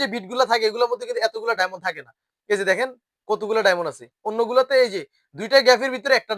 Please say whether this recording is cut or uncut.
uncut